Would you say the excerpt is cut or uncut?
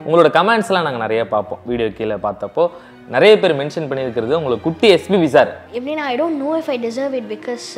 cut